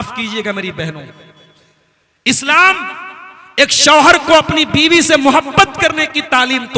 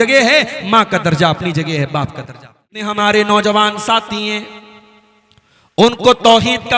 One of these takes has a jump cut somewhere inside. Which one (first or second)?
second